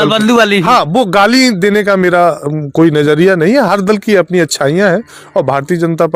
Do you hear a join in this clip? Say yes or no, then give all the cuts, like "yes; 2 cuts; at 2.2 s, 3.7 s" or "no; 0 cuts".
no; 0 cuts